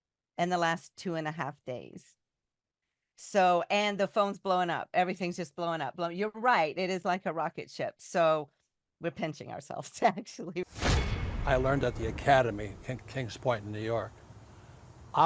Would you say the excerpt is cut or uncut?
cut